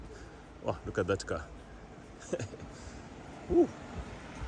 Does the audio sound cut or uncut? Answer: uncut